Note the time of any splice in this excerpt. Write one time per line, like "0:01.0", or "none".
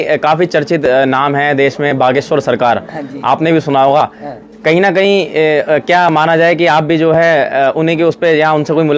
none